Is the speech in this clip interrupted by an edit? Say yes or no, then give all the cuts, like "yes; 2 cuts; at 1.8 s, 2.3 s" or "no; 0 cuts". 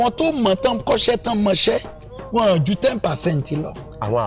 no; 0 cuts